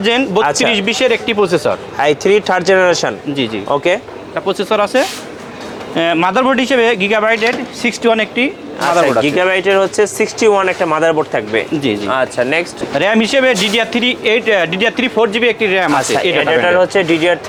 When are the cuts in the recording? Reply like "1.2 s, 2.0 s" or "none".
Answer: none